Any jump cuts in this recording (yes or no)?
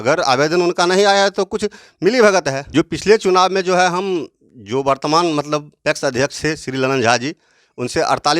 yes